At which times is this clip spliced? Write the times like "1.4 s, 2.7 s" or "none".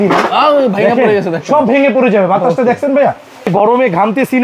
3.5 s

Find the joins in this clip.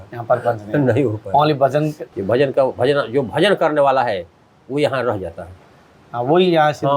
2.0 s

